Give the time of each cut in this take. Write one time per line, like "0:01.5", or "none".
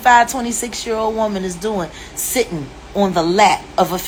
none